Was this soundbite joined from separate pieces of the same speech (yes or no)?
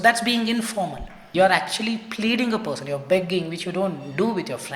yes